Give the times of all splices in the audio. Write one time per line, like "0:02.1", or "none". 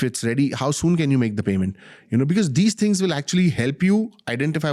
none

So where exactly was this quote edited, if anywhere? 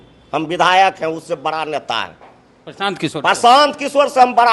none

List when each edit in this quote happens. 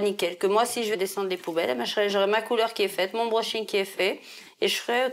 0:00.9

